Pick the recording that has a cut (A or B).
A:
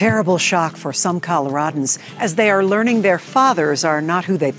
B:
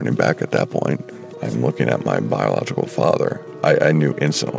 B